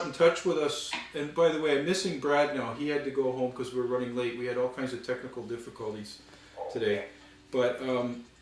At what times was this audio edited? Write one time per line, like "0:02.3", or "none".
0:02.6